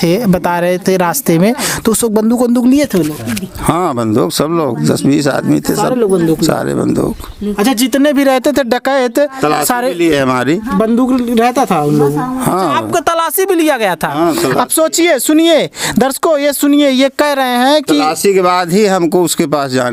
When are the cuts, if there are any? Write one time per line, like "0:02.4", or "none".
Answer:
none